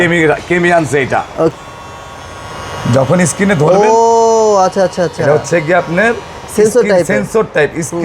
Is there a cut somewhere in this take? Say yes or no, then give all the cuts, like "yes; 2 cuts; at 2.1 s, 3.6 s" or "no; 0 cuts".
yes; 1 cut; at 1.5 s